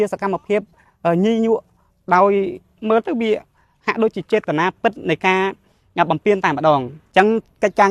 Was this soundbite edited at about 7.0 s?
yes; 1 cut; at 7.0 s

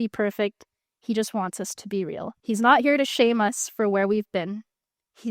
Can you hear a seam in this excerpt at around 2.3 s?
yes; 1 cut; at 2.3 s

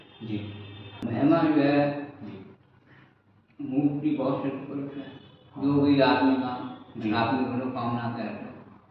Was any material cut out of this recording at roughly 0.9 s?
yes; 1 cut; at 0.9 s

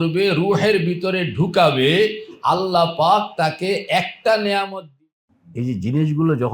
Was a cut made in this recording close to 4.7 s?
yes; 1 cut; at 4.7 s

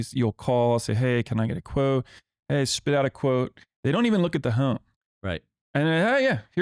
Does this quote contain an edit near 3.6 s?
no; 1 cut; at 5.5 s

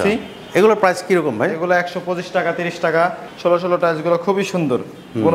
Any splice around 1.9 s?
no; 1 cut; at 3.3 s

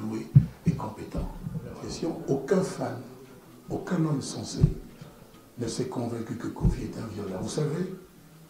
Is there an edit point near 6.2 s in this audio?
no; 1 cut; at 1.7 s

